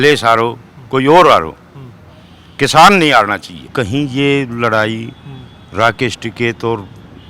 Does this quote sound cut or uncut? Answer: cut